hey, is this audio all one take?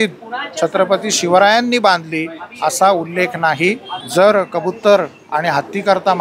no; 1 cut; at 3.9 s

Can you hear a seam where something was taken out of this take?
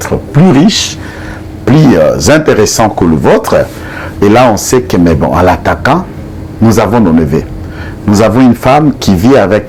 no; 0 cuts

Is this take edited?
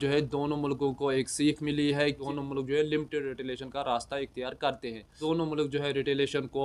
no; 0 cuts

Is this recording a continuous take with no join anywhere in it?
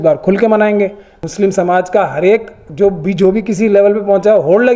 no; 1 cut; at 1.1 s

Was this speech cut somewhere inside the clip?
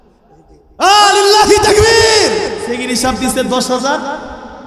yes; 1 cut; at 2.6 s

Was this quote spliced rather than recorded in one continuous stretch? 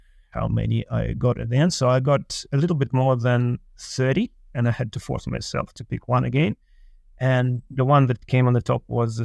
no; 0 cuts

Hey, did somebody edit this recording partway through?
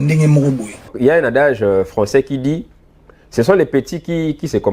yes; 1 cut; at 0.9 s

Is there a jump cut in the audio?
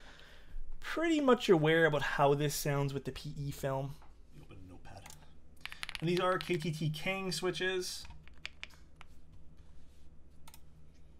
no; 0 cuts

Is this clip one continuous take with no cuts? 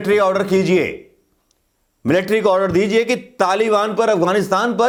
yes; 0 cuts

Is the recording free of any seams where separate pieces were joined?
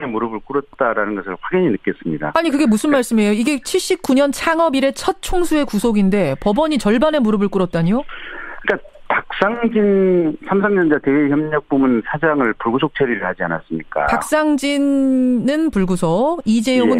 no; 1 cut; at 15.1 s

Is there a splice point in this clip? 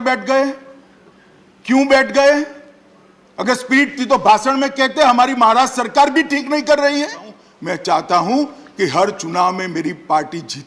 yes; 1 cut; at 7.4 s

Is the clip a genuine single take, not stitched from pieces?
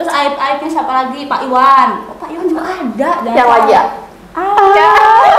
yes; 0 cuts

